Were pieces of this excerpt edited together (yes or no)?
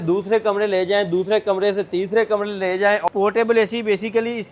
yes